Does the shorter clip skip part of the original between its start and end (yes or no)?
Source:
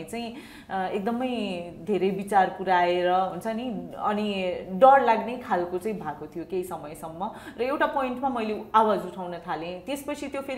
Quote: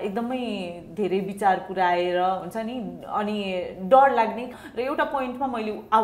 yes